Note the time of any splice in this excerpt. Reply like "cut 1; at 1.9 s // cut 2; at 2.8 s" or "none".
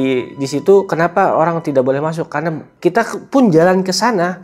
cut 1; at 2.7 s